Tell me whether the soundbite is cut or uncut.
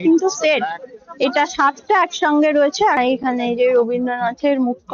cut